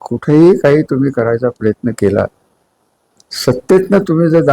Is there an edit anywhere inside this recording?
no; 0 cuts

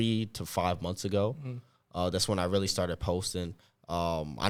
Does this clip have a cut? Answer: no; 0 cuts

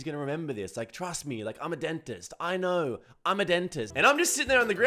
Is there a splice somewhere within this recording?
yes; 1 cut; at 3.9 s

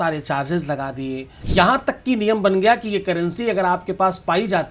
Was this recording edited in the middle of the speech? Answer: yes; 1 cut; at 1.3 s

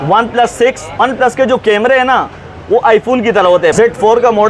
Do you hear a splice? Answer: yes; 2 cuts; at 1.0 s, 3.7 s

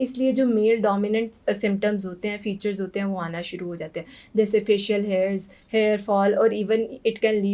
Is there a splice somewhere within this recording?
no; 0 cuts

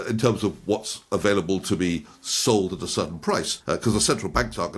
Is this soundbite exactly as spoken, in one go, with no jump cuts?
no; 1 cut; at 3.5 s

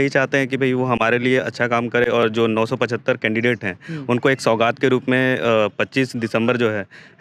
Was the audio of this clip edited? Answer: no; 0 cuts

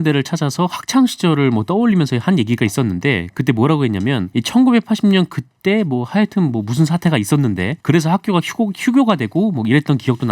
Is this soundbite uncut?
no; 2 cuts; at 4.3 s, 7.7 s

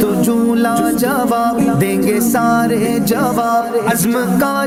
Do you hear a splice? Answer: no; 0 cuts

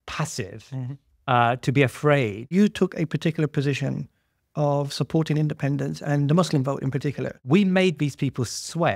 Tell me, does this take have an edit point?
yes; 2 cuts; at 2.5 s, 7.3 s

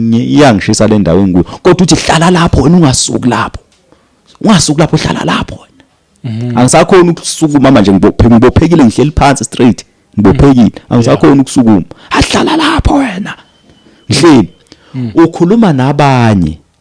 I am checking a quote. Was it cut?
no; 0 cuts

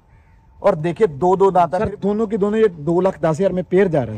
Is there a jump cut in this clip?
yes; 1 cut; at 1.8 s

